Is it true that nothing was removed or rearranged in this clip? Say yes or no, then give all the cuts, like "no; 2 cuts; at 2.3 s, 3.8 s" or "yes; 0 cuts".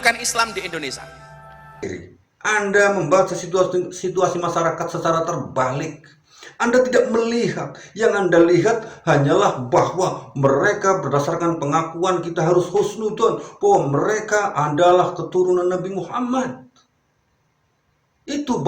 no; 1 cut; at 1.8 s